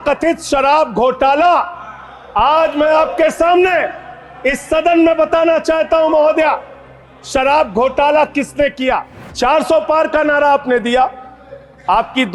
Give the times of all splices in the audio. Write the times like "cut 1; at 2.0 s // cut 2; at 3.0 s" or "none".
cut 1; at 9.2 s